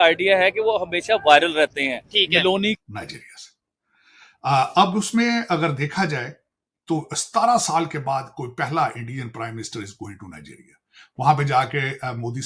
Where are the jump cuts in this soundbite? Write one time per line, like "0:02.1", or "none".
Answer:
0:02.8